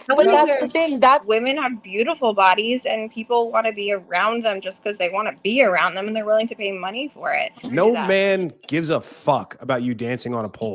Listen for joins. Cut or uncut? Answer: cut